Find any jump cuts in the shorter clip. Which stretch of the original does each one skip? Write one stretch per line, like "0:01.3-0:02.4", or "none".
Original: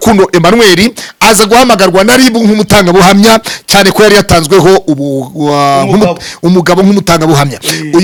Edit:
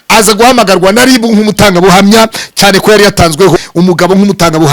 0:04.7-0:06.2